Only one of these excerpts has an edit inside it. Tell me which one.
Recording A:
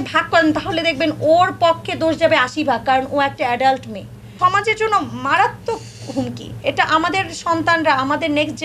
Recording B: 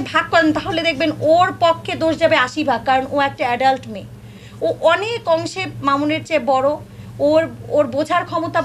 A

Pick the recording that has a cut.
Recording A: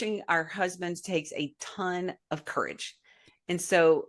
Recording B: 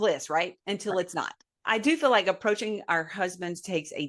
B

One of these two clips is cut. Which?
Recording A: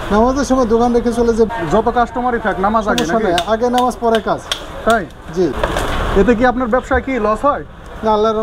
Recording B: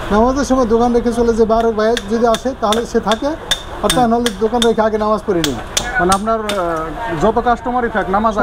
A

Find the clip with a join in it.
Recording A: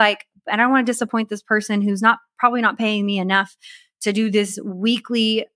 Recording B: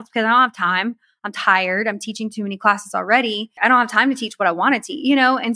B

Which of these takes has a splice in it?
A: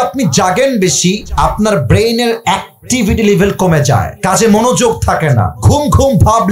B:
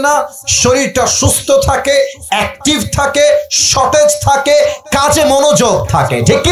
A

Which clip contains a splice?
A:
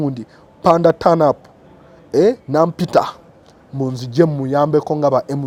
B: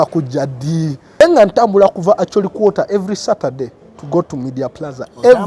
B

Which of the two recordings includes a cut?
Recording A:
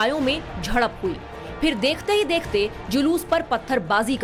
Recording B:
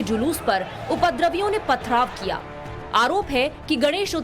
B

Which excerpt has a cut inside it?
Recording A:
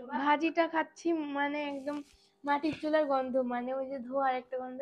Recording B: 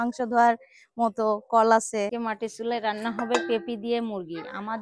B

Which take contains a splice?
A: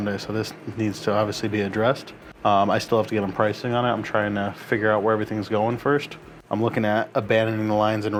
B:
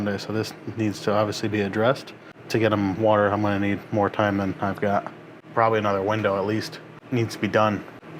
B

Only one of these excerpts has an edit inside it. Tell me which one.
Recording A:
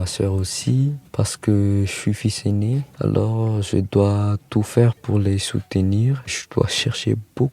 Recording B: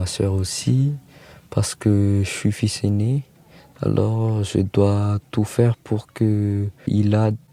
A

